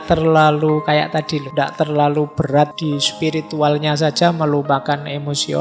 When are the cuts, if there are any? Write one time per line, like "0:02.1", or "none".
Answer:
0:01.4
0:02.8